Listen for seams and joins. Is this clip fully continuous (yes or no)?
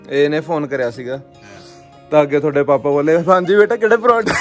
yes